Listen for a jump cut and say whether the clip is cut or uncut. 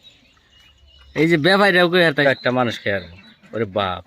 cut